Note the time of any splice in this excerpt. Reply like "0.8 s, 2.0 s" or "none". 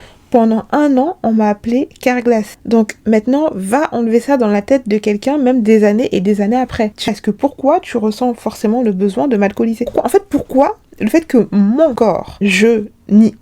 7.1 s